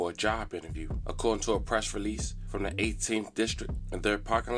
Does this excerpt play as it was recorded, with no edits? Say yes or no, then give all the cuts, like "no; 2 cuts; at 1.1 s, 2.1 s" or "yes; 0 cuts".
yes; 0 cuts